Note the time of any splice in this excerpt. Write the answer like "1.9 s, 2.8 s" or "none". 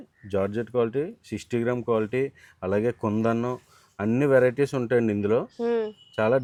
none